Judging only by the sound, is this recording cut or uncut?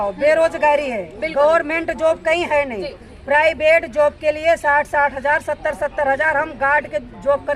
uncut